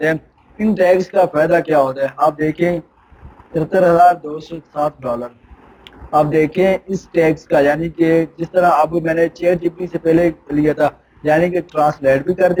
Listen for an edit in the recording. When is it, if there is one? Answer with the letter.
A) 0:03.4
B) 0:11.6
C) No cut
C